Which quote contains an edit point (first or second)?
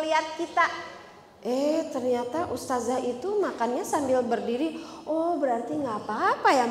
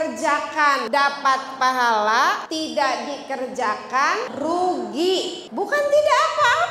second